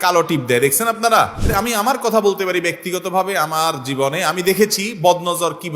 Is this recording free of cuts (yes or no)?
no